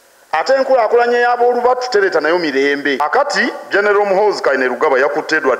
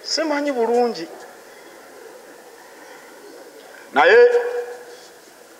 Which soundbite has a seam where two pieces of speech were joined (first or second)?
first